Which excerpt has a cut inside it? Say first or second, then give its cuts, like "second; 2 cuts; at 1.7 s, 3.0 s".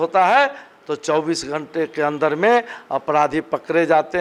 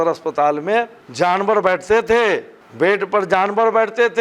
second; 1 cut; at 1.0 s